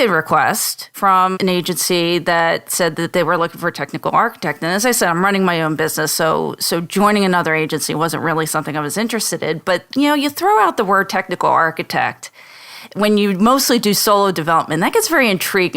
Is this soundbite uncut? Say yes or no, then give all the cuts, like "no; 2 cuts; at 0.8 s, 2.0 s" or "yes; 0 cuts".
no; 1 cut; at 1.1 s